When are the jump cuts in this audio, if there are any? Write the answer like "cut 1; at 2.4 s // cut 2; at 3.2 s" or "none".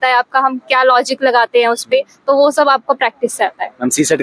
none